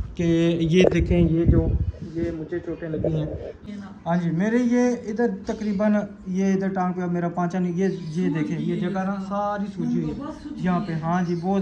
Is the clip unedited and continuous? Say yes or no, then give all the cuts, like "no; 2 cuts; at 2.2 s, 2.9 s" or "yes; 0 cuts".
no; 1 cut; at 3.7 s